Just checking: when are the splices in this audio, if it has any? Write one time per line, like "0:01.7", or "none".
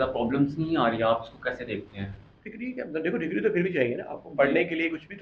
none